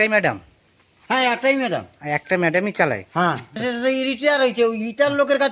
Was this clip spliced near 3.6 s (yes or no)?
yes